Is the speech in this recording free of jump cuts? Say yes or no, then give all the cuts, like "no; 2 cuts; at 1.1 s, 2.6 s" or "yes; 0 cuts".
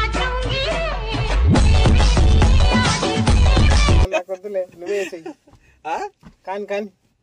yes; 0 cuts